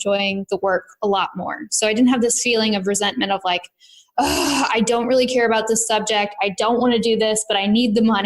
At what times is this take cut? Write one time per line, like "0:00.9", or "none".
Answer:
none